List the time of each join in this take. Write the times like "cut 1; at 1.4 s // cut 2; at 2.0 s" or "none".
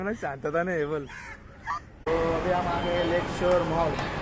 cut 1; at 2.1 s